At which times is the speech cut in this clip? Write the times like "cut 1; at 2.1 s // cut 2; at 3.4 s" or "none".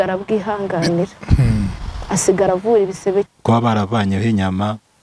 cut 1; at 3.3 s